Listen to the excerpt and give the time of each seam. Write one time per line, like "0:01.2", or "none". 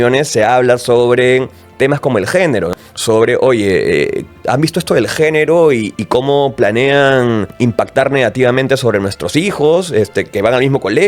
0:02.7
0:07.5